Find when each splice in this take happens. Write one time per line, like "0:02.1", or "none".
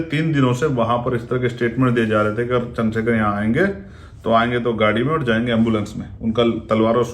none